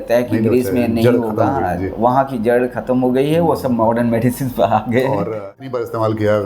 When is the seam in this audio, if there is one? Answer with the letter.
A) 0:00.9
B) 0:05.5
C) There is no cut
B